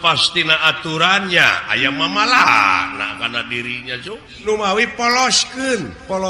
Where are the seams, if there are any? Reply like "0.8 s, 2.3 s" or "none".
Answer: 4.5 s

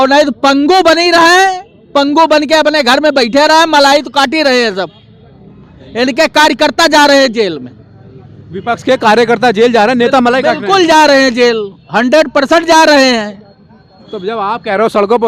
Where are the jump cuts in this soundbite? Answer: none

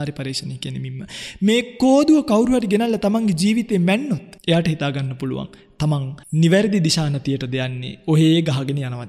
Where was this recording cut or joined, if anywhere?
4.3 s, 6.2 s

